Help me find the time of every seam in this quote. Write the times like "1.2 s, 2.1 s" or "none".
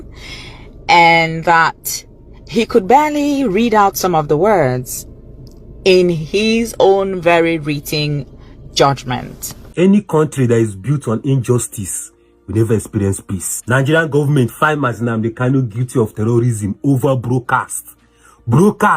9.7 s